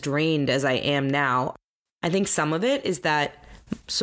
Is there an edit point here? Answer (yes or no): yes